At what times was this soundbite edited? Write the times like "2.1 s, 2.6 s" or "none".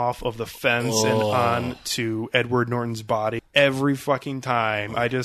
3.4 s